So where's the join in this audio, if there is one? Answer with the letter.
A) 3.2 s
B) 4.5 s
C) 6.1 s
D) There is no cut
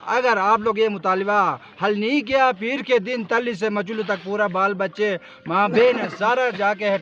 D